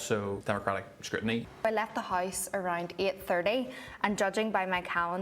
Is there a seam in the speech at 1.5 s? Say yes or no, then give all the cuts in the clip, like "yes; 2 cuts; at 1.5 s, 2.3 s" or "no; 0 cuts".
yes; 1 cut; at 1.5 s